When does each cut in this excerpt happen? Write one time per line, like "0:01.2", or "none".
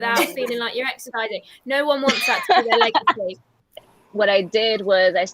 0:04.0